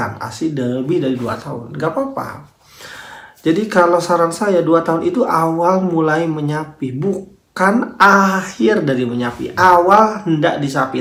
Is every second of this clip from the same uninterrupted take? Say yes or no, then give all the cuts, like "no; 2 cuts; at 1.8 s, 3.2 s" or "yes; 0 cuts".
yes; 0 cuts